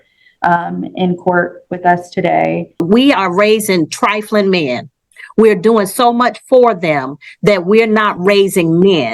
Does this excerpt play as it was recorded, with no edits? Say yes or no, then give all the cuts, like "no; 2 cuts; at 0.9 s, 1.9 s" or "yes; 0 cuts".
no; 1 cut; at 2.8 s